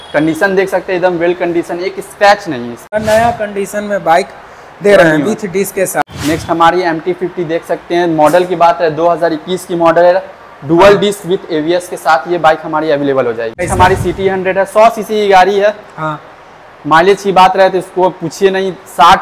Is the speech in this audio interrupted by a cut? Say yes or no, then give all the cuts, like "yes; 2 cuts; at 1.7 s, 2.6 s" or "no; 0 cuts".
yes; 3 cuts; at 2.9 s, 6.0 s, 13.7 s